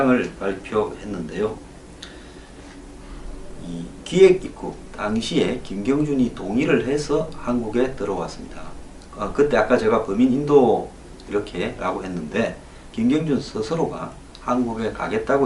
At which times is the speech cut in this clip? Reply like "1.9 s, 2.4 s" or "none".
none